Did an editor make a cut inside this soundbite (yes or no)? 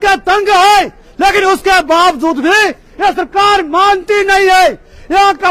no